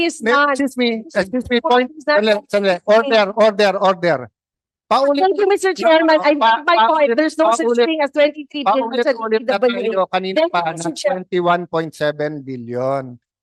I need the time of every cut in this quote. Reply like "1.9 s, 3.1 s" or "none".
none